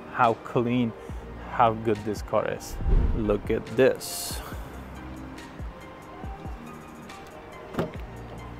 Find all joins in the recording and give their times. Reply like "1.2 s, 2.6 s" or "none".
none